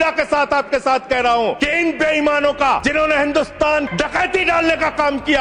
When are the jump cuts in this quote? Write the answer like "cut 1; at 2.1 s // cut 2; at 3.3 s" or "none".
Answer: cut 1; at 1.6 s // cut 2; at 2.8 s // cut 3; at 3.9 s